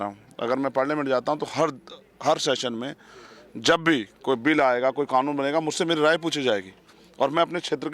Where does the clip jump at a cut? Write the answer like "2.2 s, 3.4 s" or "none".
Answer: none